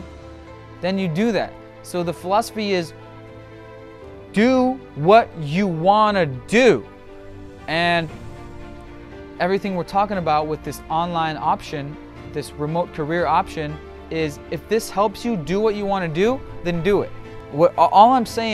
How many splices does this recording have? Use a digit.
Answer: 0